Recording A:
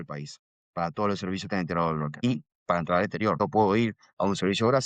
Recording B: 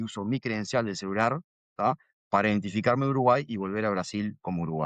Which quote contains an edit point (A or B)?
A